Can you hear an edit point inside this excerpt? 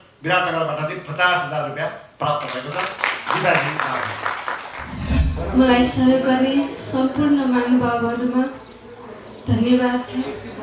yes; 1 cut; at 5.3 s

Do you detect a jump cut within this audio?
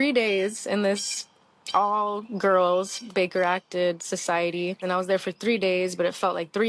yes; 1 cut; at 4.8 s

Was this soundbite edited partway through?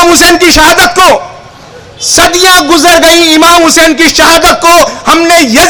no; 0 cuts

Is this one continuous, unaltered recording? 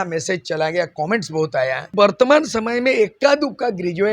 no; 1 cut; at 1.9 s

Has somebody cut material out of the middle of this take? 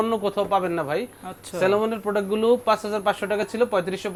no; 0 cuts

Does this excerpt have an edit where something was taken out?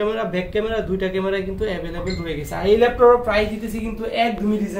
no; 0 cuts

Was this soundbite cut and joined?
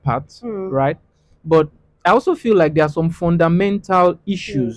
no; 0 cuts

